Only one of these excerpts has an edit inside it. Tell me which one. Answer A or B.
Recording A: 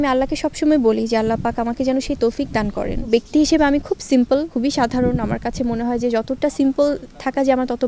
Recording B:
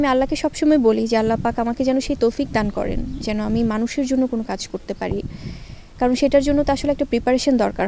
A